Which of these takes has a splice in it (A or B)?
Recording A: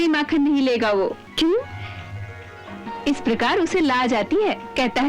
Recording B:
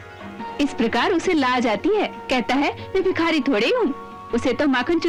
A